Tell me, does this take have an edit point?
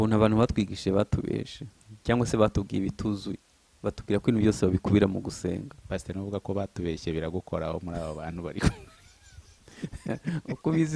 no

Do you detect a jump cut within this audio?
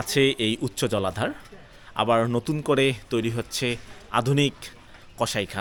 no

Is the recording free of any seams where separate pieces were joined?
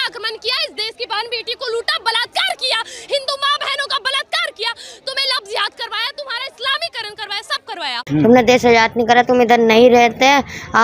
no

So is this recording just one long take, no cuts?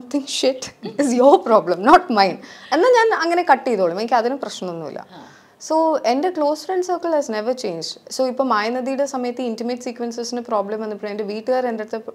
yes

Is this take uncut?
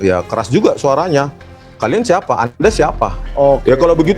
no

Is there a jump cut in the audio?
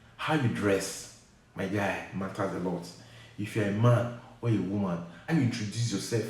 yes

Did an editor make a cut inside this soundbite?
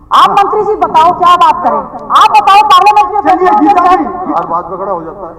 yes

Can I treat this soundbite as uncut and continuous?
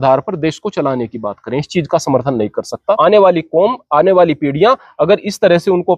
no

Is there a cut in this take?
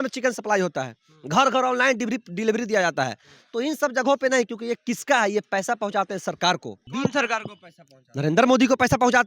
yes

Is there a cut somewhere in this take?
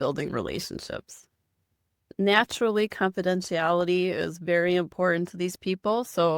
yes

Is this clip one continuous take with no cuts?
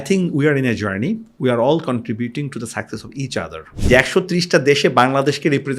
no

